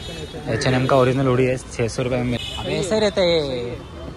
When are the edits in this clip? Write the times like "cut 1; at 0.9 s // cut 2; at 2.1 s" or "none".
cut 1; at 2.4 s

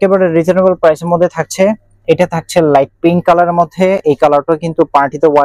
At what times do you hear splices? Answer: none

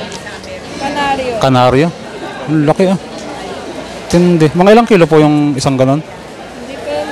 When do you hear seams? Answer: none

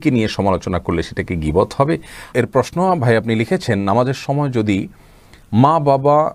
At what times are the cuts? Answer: cut 1; at 2.3 s

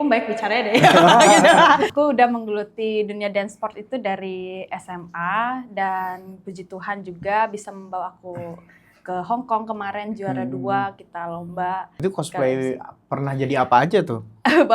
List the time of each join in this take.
cut 1; at 1.9 s // cut 2; at 12.0 s

